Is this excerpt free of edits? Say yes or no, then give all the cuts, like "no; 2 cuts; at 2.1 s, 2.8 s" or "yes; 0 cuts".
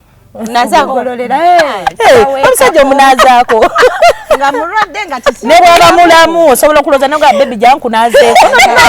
no; 1 cut; at 1.8 s